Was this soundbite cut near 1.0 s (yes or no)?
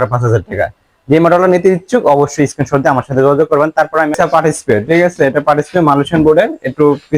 no